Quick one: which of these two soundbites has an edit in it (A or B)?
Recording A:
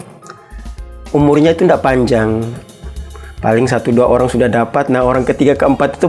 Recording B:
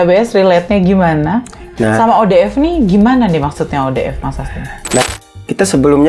B